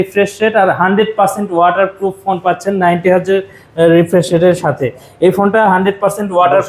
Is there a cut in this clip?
no; 0 cuts

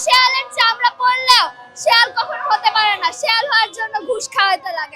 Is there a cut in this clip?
no; 0 cuts

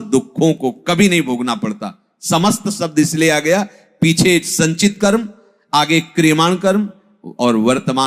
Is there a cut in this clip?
no; 0 cuts

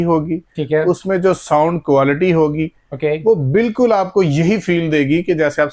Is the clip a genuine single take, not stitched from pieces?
yes; 0 cuts

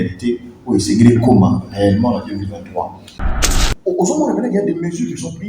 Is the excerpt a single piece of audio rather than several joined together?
no; 1 cut; at 3.4 s

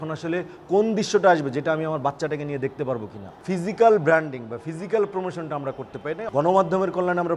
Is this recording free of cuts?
no; 2 cuts; at 3.3 s, 6.2 s

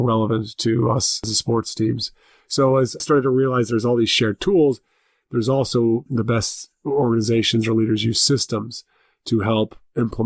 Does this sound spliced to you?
yes; 3 cuts; at 1.2 s, 3.0 s, 6.1 s

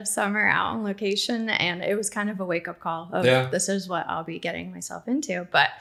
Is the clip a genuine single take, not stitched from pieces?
yes; 0 cuts

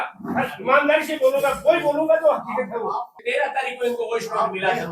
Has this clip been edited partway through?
yes; 1 cut; at 3.1 s

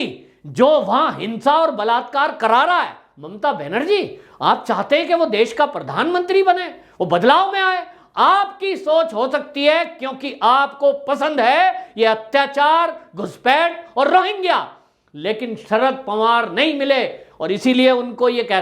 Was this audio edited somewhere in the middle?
no; 0 cuts

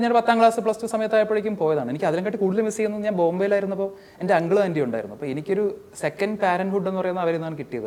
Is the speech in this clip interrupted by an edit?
no; 0 cuts

